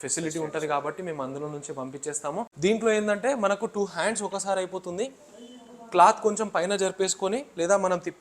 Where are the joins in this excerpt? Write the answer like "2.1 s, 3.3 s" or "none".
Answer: 2.5 s

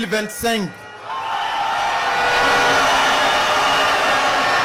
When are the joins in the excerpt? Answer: none

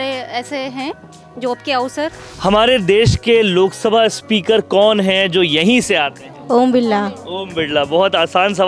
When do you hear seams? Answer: 2.2 s

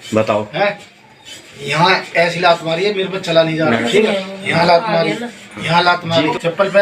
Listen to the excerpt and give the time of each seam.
3.8 s

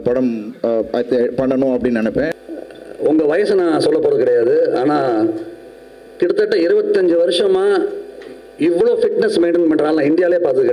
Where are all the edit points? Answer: 2.3 s

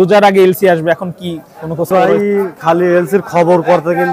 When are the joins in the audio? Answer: 1.9 s

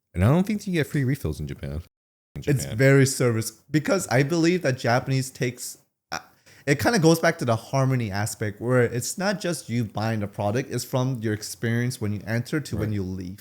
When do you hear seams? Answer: 2.2 s

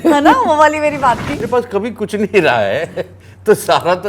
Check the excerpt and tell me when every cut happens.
1.4 s

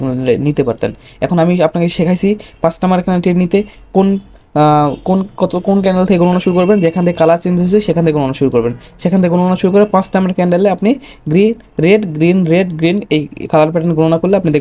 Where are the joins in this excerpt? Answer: none

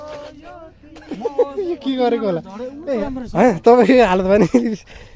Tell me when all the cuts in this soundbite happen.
3.0 s

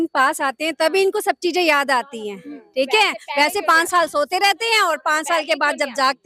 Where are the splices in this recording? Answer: none

